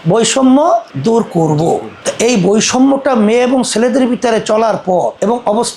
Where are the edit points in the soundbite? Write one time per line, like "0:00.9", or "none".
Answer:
none